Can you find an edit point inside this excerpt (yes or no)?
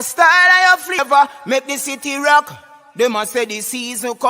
yes